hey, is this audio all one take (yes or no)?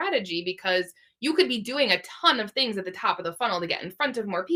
yes